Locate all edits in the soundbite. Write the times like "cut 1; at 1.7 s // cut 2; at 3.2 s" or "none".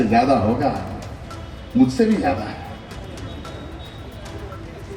none